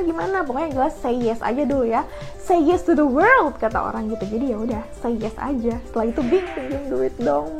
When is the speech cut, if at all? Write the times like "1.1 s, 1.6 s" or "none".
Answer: 6.5 s